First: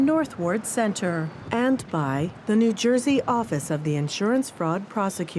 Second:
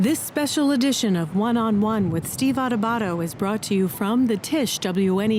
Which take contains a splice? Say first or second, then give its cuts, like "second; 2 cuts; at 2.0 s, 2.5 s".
first; 1 cut; at 2.3 s